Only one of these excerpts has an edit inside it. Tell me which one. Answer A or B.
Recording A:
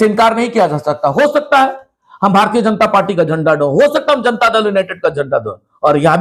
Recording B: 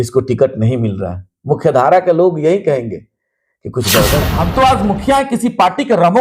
B